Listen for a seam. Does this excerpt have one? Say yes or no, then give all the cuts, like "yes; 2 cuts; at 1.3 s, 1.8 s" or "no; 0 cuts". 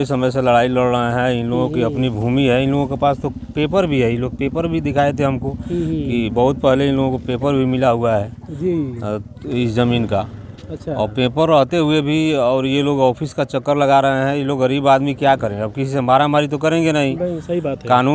no; 0 cuts